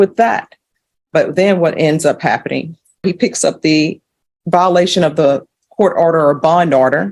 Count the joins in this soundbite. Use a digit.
1